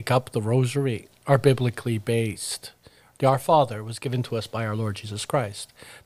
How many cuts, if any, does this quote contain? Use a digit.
0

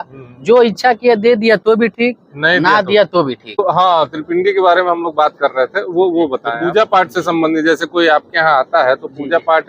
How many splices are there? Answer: 2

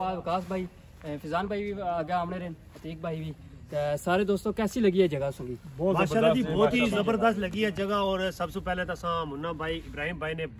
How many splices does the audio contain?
0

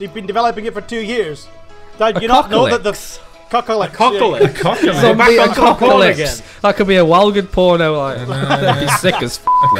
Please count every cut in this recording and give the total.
0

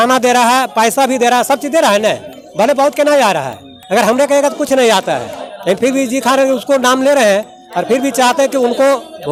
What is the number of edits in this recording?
0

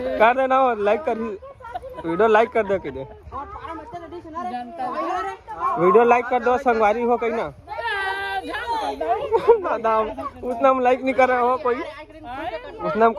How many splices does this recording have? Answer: 0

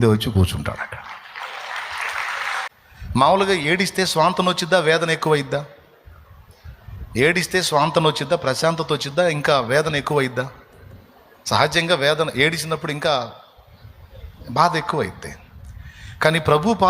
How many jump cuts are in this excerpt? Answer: 1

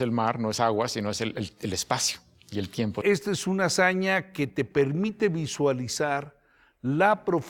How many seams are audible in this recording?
1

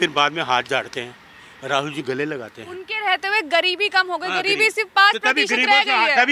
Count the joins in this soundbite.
0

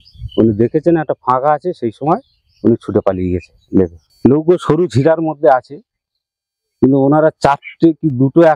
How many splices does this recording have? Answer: 1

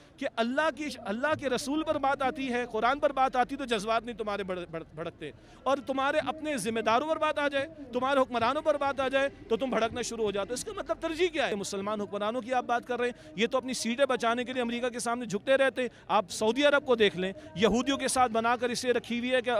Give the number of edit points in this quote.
1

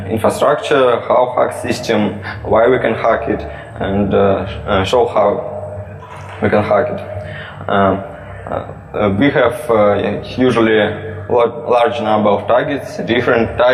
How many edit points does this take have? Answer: 1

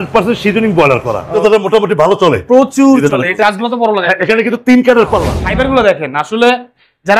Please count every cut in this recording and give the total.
3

